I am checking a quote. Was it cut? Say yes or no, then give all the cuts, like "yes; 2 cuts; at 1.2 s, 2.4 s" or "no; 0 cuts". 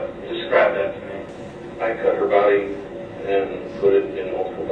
no; 0 cuts